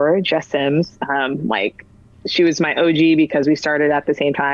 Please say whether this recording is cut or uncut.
uncut